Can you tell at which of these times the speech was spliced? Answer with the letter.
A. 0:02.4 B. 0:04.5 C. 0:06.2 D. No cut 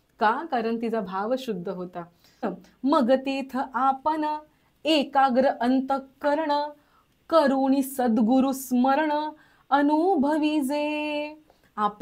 A